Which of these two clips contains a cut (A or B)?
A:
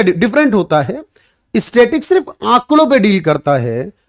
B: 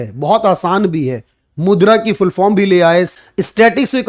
B